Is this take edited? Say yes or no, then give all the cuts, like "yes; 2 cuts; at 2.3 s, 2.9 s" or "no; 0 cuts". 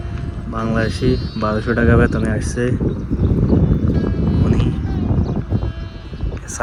no; 0 cuts